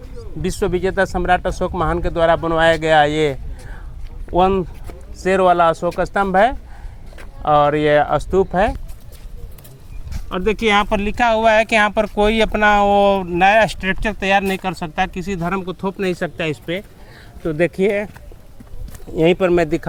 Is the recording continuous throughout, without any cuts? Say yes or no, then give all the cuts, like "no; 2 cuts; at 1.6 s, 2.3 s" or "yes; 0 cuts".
yes; 0 cuts